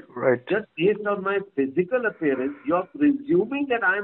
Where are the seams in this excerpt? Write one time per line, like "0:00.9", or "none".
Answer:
none